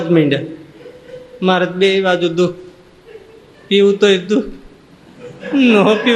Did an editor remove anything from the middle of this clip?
no; 0 cuts

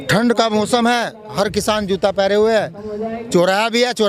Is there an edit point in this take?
no; 0 cuts

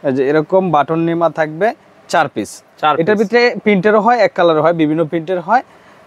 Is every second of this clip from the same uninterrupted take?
yes; 0 cuts

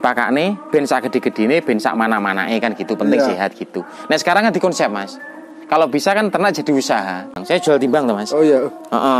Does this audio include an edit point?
yes; 1 cut; at 7.4 s

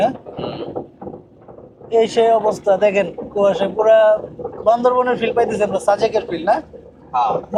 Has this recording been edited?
no; 0 cuts

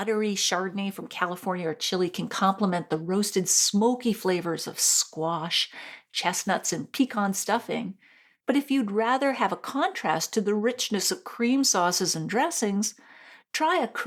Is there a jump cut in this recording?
no; 0 cuts

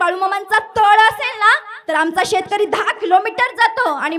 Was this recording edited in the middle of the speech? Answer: no; 0 cuts

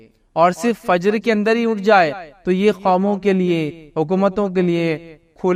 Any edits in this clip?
no; 0 cuts

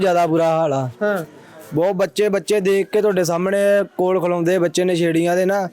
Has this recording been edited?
no; 0 cuts

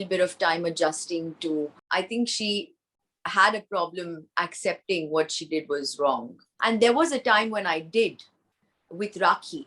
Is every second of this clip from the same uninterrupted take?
no; 2 cuts; at 1.8 s, 6.5 s

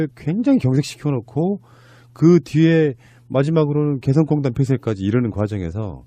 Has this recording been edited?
no; 0 cuts

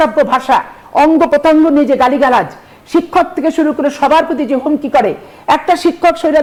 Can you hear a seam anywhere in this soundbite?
no; 0 cuts

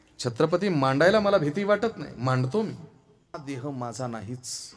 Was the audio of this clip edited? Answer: yes; 1 cut; at 3.4 s

